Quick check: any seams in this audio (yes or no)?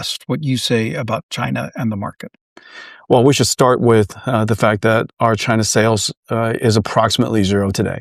no